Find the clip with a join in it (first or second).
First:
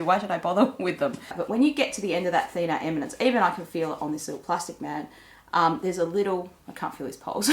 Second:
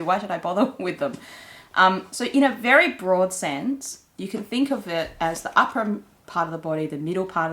first